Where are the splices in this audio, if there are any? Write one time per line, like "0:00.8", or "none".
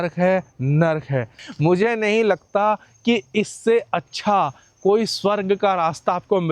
0:01.4